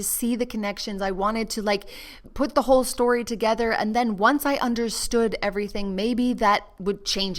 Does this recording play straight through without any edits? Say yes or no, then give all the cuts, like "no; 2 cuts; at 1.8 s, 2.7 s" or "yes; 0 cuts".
no; 1 cut; at 2.2 s